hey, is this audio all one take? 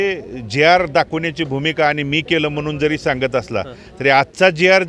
yes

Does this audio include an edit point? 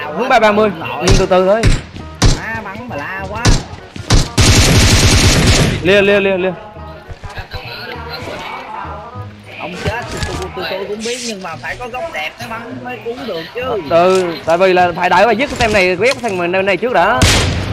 no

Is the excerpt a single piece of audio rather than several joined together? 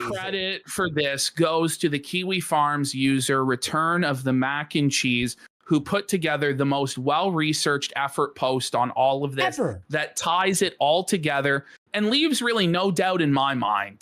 yes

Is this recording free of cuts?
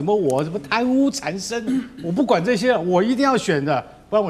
yes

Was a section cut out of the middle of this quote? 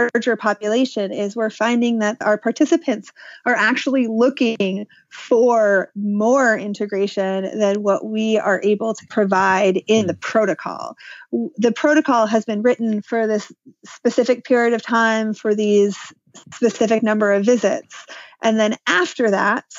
yes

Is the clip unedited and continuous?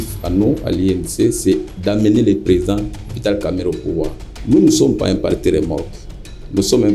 no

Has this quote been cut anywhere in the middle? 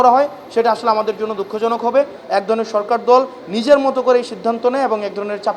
yes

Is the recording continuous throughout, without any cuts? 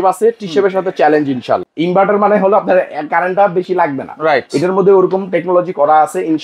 no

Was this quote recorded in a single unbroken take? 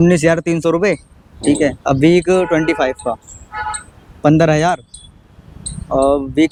yes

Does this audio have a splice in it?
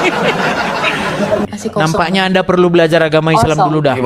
yes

